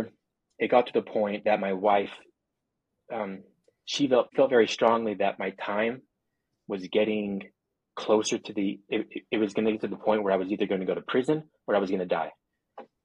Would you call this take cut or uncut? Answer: cut